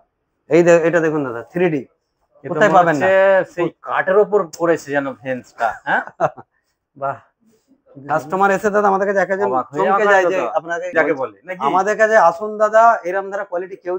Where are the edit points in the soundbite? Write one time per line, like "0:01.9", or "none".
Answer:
0:10.9